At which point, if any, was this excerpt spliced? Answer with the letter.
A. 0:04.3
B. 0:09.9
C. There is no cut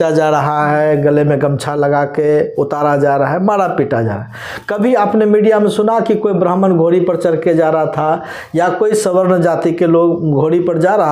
C